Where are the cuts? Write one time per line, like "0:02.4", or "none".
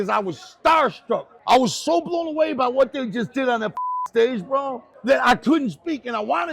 0:01.3
0:04.9